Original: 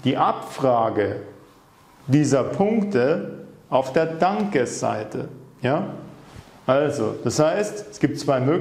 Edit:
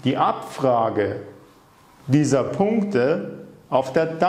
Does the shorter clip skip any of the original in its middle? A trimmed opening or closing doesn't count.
no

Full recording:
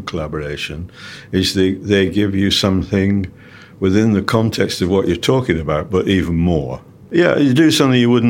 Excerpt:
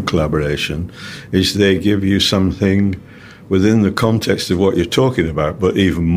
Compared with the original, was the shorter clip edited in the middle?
yes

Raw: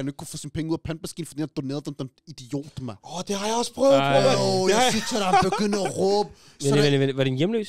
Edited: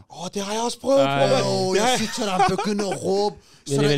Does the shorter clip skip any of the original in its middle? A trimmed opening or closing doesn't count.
no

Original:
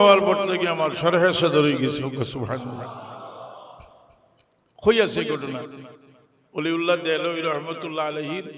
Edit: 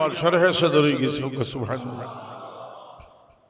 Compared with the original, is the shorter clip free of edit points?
yes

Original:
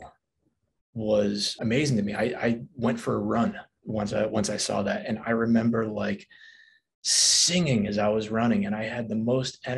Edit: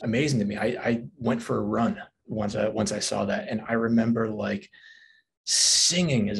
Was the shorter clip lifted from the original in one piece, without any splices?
yes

